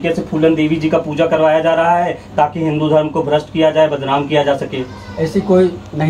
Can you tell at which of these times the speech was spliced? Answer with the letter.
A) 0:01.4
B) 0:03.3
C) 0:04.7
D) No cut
D